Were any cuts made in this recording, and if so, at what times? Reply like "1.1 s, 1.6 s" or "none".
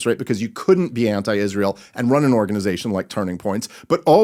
none